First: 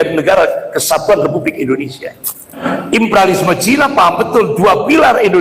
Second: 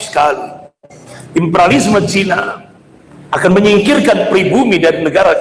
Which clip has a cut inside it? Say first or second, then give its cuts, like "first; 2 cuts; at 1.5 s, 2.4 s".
first; 1 cut; at 2.6 s